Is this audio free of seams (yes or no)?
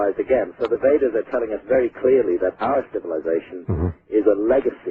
yes